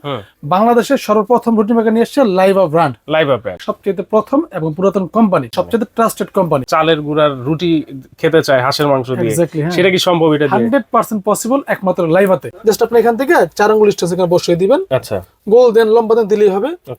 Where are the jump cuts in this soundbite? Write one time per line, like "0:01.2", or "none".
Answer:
0:03.7
0:05.5
0:06.7
0:12.5